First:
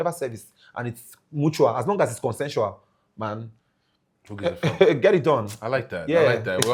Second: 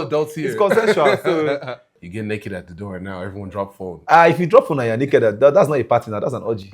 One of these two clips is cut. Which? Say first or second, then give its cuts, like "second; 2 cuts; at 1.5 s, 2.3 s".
second; 1 cut; at 1.9 s